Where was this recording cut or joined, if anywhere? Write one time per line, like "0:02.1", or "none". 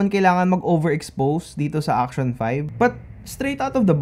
0:02.7